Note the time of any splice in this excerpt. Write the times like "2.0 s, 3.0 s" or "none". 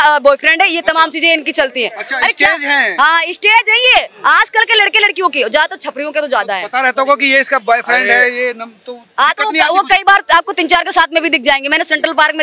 none